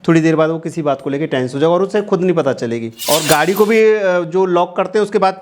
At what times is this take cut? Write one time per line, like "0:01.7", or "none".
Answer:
0:02.9